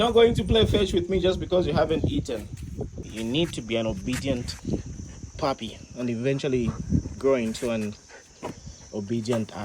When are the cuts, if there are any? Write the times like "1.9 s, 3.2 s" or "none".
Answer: 3.0 s